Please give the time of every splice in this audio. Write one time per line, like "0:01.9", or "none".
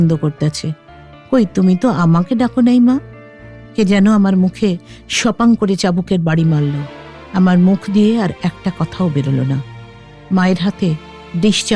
0:06.9